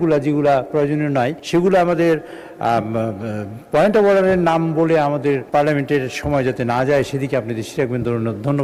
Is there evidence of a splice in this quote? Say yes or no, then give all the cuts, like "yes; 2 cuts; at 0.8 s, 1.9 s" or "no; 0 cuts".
no; 0 cuts